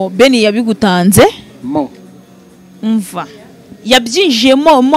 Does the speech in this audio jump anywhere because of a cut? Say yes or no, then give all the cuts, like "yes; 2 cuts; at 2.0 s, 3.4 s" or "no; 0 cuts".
no; 0 cuts